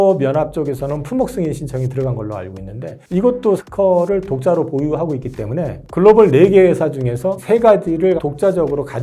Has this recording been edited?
yes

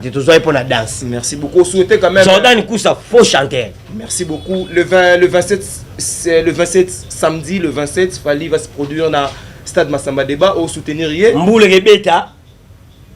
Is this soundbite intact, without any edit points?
yes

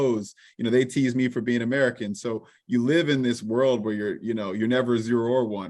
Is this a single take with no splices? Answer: yes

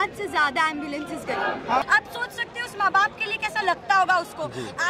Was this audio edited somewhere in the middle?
yes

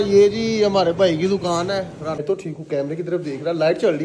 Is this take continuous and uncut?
no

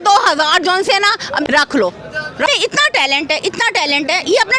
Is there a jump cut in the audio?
yes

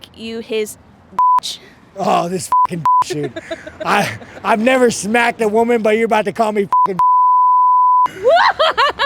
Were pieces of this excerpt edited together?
yes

